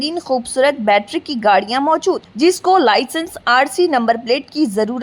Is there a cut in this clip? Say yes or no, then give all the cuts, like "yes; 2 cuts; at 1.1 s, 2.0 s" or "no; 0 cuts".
no; 0 cuts